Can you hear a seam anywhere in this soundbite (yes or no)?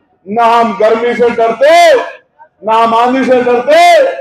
no